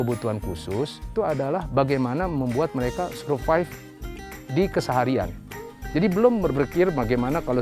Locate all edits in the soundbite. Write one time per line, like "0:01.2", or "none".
0:01.1